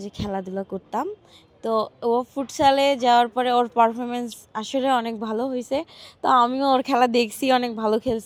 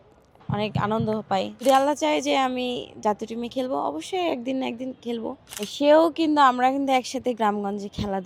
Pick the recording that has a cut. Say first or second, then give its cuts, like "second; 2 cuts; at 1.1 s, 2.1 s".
second; 2 cuts; at 1.5 s, 5.7 s